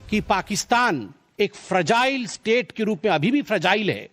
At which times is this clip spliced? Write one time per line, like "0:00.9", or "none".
0:01.2